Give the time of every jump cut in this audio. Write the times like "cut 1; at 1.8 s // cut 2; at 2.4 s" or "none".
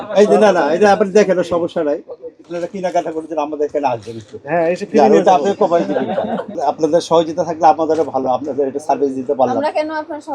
cut 1; at 2.5 s // cut 2; at 6.6 s